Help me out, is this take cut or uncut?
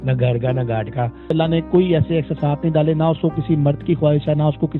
cut